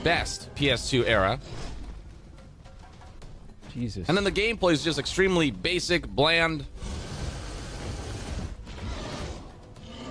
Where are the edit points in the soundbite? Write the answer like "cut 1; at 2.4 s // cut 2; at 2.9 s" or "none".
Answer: none